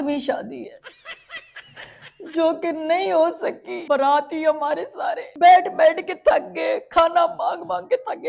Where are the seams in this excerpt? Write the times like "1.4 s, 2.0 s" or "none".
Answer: 3.7 s, 5.3 s